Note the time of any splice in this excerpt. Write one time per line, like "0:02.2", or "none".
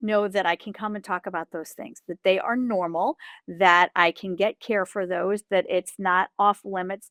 none